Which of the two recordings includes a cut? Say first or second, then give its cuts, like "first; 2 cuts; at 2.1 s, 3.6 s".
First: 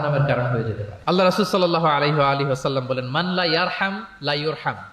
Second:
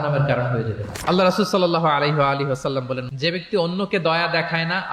second; 1 cut; at 3.1 s